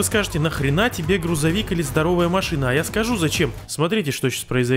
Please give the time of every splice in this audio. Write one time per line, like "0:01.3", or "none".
0:03.6